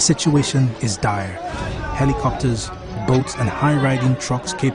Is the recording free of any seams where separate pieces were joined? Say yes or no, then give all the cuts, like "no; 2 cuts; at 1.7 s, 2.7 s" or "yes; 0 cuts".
no; 1 cut; at 3.2 s